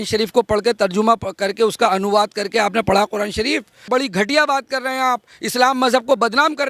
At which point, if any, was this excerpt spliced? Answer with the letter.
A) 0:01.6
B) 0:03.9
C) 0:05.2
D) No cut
B